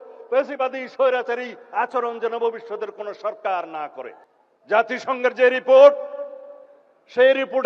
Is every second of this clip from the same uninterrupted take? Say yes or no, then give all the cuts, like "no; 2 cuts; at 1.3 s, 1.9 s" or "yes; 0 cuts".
no; 1 cut; at 4.2 s